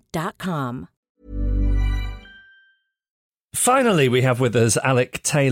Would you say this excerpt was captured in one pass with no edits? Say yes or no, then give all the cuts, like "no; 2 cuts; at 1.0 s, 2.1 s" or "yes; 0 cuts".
yes; 0 cuts